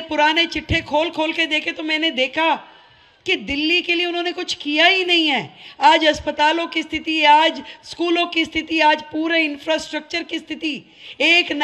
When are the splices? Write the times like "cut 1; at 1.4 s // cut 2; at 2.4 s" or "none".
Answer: none